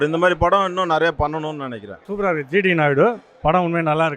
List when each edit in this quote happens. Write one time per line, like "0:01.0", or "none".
0:02.0